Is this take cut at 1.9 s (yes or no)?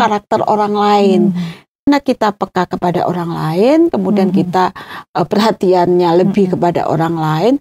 yes